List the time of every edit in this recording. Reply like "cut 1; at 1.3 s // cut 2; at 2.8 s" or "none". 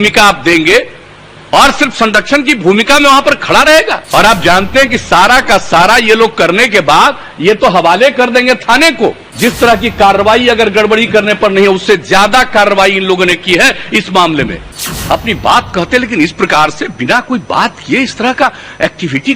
cut 1; at 4.0 s // cut 2; at 9.3 s // cut 3; at 14.6 s